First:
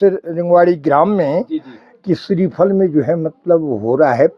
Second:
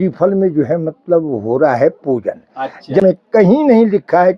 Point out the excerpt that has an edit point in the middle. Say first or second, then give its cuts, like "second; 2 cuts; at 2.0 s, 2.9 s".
second; 1 cut; at 3.0 s